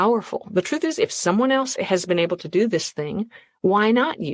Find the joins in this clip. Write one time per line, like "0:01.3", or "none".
0:01.7